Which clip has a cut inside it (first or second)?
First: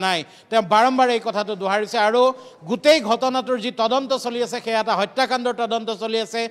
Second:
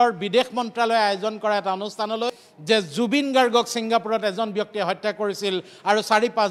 second